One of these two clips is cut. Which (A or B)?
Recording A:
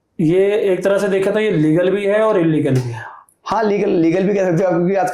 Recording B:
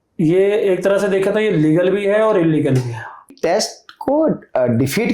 B